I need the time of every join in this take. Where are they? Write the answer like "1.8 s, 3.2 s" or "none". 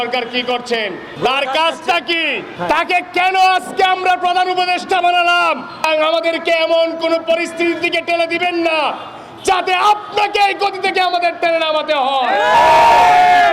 1.1 s, 2.5 s, 5.8 s